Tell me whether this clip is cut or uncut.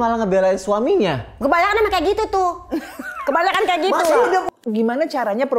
cut